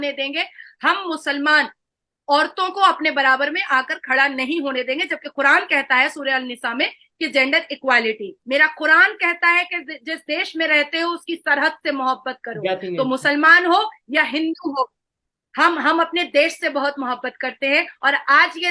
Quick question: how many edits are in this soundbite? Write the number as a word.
one